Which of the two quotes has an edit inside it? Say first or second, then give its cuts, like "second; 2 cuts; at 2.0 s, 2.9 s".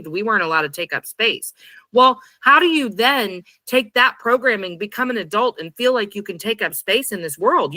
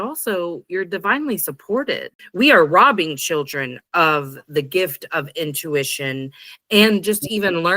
second; 1 cut; at 2.1 s